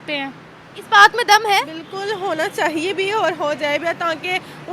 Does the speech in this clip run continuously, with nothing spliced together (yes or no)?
no